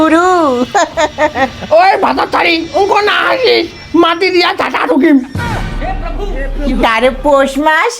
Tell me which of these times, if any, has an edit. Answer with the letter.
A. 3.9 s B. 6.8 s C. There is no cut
B